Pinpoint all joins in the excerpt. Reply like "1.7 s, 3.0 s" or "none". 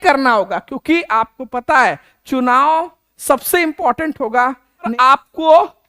4.9 s